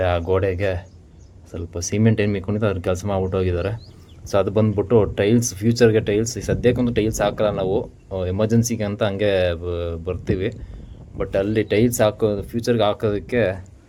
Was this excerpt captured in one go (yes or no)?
yes